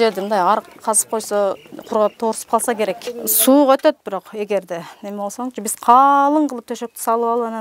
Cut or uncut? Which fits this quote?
cut